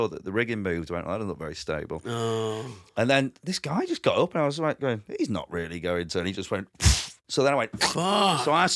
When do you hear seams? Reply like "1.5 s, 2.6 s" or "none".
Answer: none